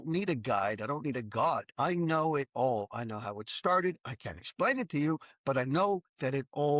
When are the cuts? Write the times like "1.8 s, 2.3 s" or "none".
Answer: 1.7 s

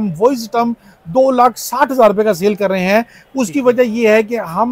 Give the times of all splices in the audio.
none

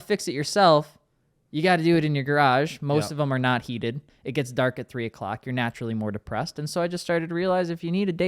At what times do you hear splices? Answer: 4.1 s

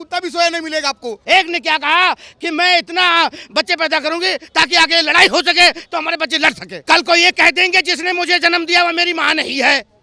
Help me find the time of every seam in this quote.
1.2 s, 6.7 s

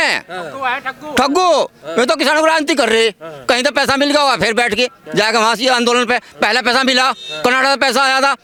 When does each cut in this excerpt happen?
none

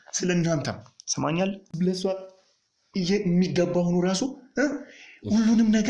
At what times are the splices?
1.7 s

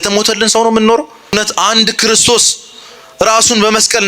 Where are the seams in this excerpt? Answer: 1.3 s

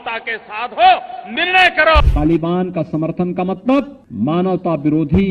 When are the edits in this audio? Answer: 2.0 s

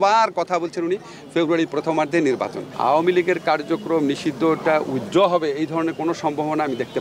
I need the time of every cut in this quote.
2.6 s

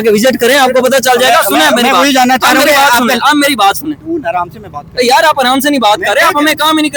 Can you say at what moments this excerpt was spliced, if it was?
none

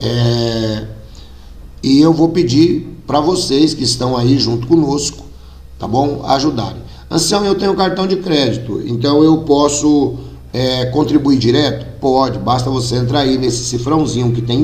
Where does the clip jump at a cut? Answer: none

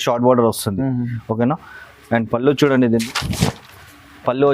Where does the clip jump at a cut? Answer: 3.0 s

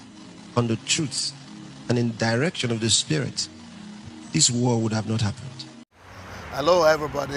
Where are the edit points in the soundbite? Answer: 5.9 s

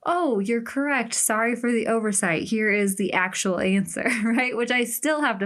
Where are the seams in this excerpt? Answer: none

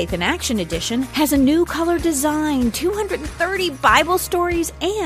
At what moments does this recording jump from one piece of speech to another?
none

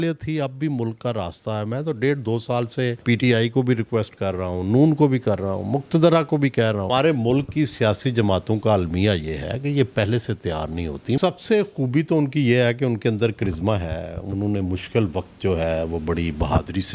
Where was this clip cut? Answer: 3.0 s, 6.9 s, 11.2 s

